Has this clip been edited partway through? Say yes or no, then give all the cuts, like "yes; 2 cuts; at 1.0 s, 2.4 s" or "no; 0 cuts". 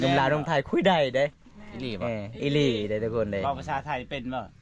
no; 0 cuts